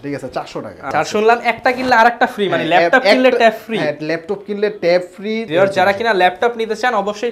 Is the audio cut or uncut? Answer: cut